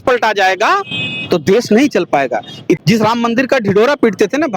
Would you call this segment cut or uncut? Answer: cut